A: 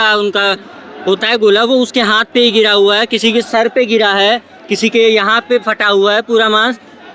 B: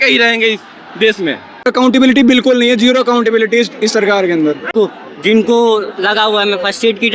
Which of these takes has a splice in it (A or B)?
B